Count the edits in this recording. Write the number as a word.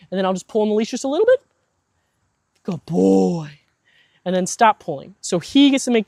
zero